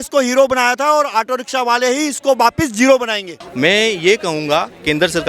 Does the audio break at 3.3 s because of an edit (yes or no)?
yes